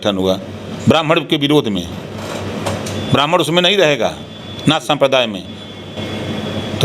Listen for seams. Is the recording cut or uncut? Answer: uncut